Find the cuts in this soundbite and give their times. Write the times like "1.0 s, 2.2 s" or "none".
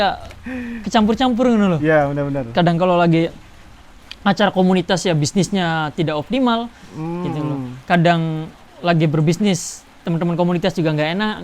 none